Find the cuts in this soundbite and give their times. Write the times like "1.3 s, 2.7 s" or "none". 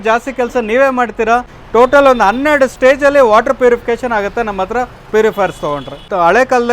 1.5 s, 5.9 s